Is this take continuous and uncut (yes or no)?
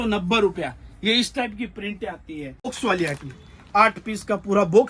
no